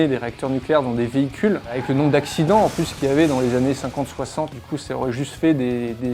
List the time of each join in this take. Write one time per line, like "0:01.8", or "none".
0:01.8
0:04.6